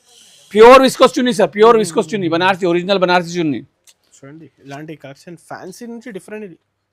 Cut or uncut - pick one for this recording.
uncut